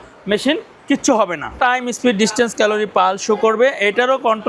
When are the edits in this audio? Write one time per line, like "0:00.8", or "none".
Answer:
0:01.5